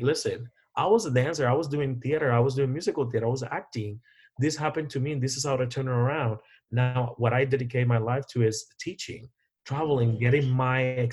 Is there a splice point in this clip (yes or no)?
no